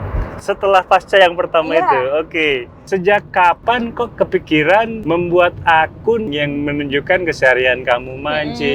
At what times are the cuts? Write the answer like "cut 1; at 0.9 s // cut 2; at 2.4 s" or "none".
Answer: cut 1; at 2.7 s // cut 2; at 5.0 s // cut 3; at 6.3 s